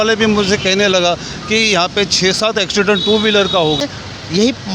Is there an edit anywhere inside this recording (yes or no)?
yes